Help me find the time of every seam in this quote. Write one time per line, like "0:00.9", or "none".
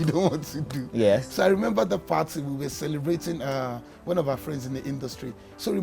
none